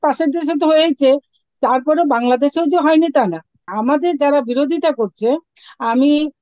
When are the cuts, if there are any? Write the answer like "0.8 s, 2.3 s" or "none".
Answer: 3.6 s